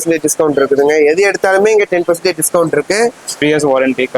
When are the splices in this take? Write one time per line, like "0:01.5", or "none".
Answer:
0:03.3